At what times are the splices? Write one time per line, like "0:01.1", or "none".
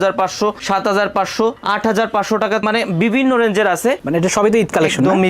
0:02.6
0:04.0